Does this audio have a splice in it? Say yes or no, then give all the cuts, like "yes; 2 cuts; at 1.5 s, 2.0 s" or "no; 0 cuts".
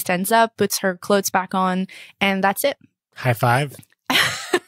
no; 0 cuts